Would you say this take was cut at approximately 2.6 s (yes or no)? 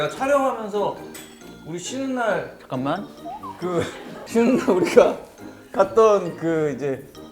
no